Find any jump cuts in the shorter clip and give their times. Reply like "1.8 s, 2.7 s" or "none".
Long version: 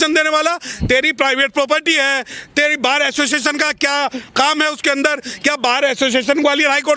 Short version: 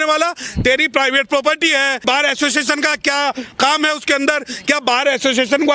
2.0 s